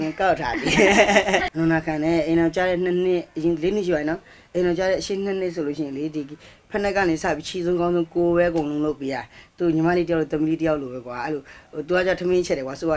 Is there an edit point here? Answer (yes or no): yes